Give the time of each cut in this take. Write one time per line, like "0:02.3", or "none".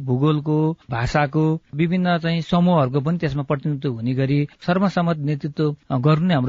0:04.5